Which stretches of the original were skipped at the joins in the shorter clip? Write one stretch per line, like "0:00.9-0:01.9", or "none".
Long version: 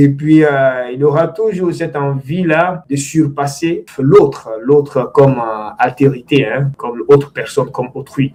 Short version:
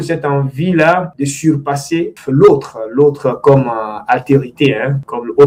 none

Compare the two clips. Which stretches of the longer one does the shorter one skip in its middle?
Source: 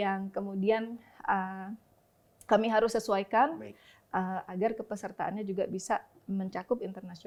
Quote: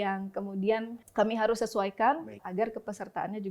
0:01.0-0:02.3
0:03.8-0:04.5

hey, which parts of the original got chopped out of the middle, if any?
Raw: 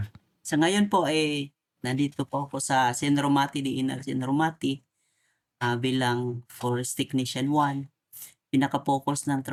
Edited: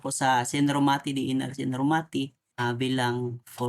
0:04.9-0:05.5

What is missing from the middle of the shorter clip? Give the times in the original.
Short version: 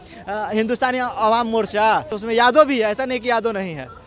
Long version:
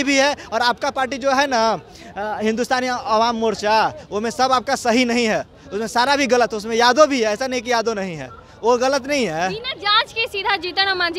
0:04.0-0:06.6

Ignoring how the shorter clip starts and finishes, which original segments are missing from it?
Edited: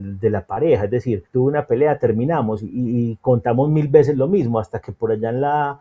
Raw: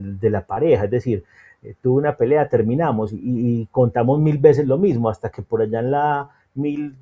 0:01.2-0:01.7

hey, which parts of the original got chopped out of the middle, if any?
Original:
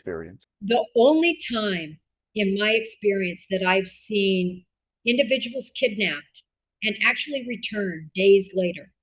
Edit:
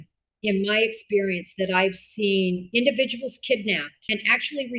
0:04.6-0:05.0
0:06.3-0:06.7

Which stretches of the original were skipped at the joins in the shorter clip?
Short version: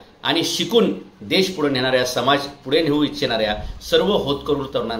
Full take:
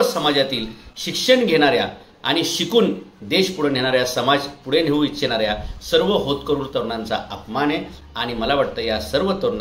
none

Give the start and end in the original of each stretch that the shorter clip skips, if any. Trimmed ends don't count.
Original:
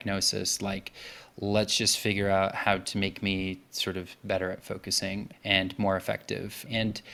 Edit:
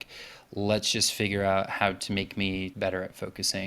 0:03.6-0:04.2

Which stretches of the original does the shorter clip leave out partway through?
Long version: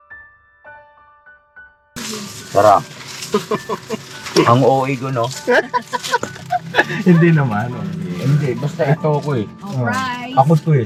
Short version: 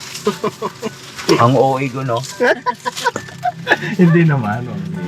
none

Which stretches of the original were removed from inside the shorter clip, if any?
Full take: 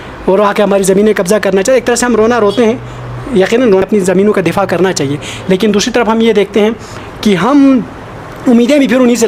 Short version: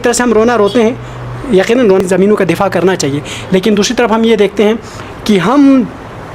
0:03.9-0:04.0

